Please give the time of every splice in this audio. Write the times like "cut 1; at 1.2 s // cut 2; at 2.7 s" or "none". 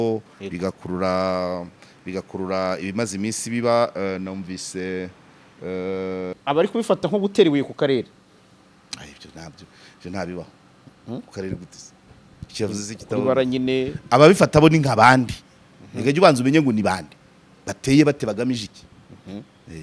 cut 1; at 6.3 s